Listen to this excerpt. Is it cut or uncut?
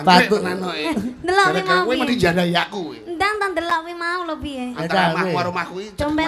uncut